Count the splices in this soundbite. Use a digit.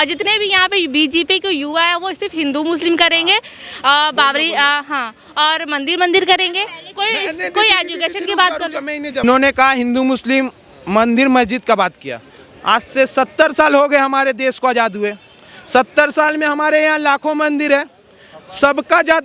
1